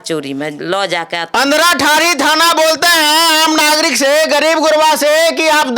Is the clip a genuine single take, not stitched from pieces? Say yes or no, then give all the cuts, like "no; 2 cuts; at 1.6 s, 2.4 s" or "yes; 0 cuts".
no; 1 cut; at 1.3 s